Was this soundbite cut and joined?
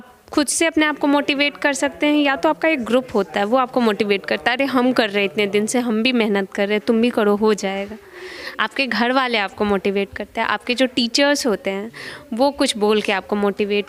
no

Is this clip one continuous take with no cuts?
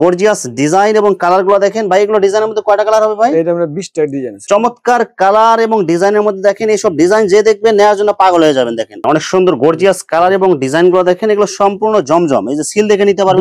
no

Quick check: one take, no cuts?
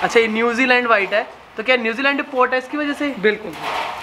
yes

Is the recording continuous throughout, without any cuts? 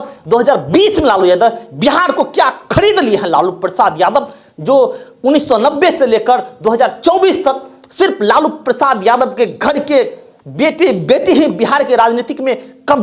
yes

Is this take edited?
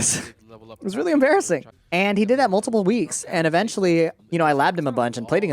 yes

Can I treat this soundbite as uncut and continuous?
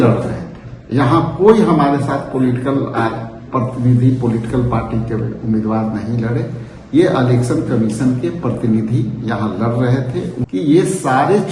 no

